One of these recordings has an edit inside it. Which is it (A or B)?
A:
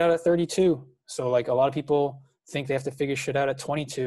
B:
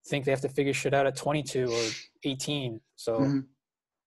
B